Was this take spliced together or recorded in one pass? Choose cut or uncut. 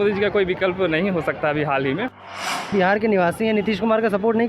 cut